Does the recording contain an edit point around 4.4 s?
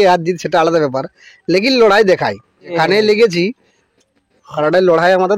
no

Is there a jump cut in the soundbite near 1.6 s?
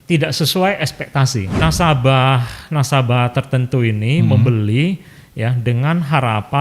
yes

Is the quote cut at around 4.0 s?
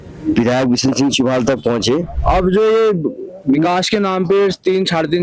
no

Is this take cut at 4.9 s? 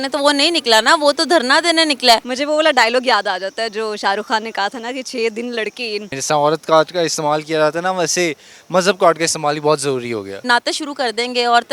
no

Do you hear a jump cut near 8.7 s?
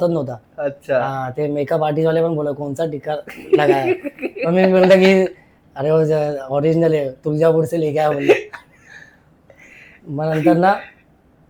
no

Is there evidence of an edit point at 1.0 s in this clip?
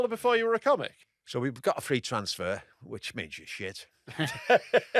yes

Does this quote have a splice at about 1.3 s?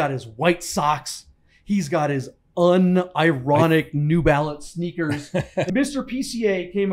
no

